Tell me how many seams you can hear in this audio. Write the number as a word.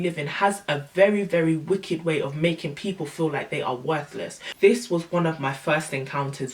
one